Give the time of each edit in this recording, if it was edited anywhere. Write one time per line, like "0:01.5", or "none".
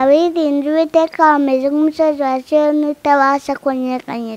none